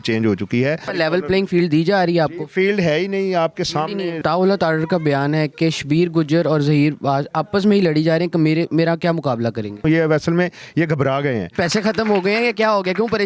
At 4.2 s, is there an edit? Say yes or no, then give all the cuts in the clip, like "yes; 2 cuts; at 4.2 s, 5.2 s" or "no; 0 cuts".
yes; 4 cuts; at 0.9 s, 4.2 s, 9.8 s, 11.5 s